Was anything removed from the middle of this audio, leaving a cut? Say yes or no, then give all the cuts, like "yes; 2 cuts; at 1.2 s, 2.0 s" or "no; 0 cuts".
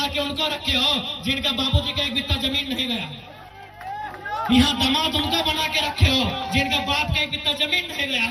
no; 0 cuts